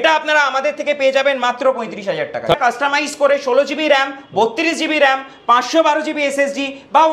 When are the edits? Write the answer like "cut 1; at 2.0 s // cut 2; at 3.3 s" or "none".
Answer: cut 1; at 2.6 s